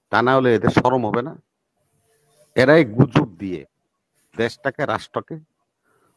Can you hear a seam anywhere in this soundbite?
no; 0 cuts

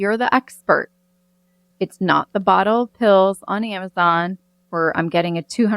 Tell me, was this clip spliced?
yes; 1 cut; at 1.7 s

